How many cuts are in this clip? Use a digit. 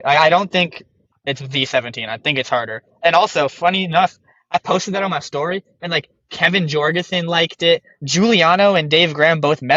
1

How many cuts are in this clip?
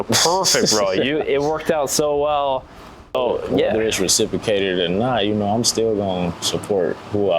1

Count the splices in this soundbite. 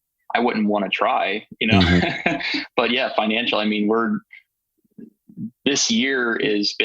0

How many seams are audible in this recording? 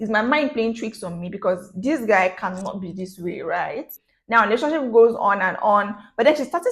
1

